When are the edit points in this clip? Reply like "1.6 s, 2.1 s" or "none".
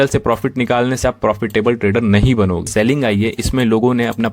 2.7 s